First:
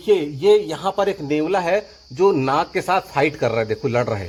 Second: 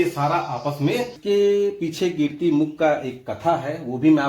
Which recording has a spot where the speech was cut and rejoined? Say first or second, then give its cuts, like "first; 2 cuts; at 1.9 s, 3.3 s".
second; 1 cut; at 1.2 s